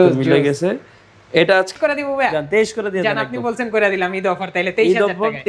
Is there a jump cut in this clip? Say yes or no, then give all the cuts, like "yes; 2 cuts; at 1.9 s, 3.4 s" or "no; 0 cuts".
yes; 1 cut; at 1.7 s